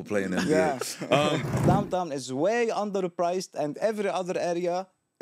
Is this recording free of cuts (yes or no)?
no